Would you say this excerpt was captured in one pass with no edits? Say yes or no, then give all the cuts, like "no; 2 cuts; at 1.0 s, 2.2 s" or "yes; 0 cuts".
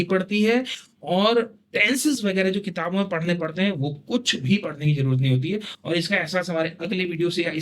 yes; 0 cuts